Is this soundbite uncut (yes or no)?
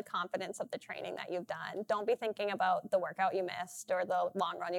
yes